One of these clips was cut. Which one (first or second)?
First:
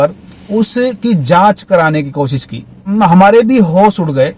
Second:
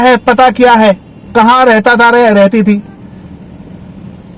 first